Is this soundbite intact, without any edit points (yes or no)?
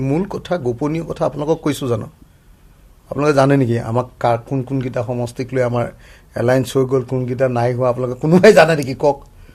yes